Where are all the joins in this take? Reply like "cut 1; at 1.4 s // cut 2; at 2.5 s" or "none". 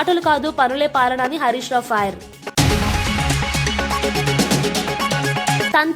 cut 1; at 2.3 s